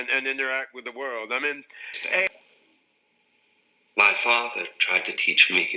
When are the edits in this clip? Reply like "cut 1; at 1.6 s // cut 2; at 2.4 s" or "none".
cut 1; at 2.3 s